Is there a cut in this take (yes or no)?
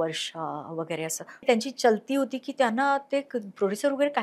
yes